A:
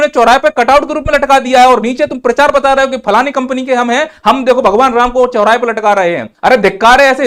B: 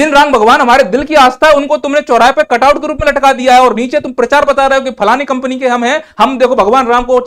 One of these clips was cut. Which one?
A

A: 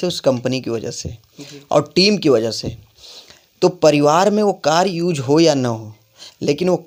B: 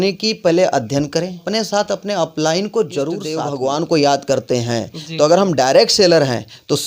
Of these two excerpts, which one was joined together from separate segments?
B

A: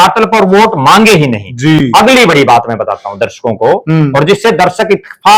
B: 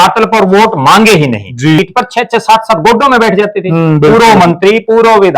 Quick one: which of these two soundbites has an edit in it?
B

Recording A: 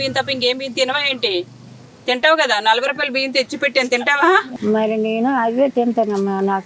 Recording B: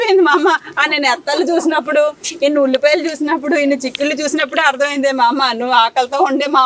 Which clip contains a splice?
A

